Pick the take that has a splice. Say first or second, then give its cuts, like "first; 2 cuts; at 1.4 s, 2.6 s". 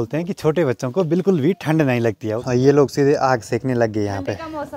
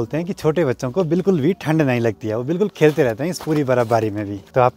first; 1 cut; at 2.5 s